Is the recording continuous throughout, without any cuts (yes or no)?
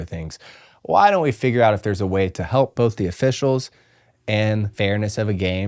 no